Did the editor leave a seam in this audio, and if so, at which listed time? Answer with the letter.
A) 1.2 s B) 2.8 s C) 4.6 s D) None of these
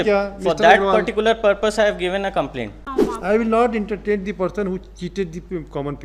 B